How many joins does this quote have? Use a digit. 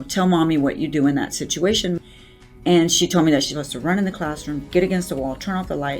1